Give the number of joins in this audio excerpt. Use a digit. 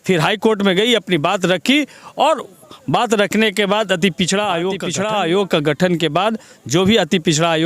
1